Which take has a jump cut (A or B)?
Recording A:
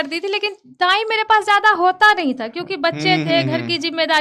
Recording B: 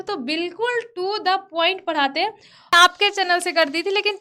B